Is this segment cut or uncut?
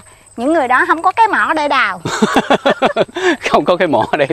uncut